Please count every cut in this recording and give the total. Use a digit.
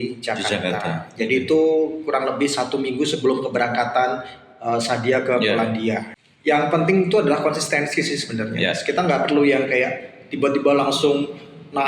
1